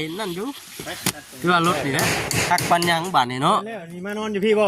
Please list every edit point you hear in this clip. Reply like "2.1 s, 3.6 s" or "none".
2.0 s